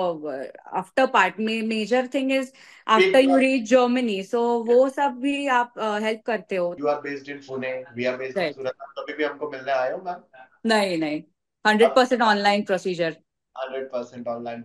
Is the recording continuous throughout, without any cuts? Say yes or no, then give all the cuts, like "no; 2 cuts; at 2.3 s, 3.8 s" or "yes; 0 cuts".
no; 1 cut; at 6.8 s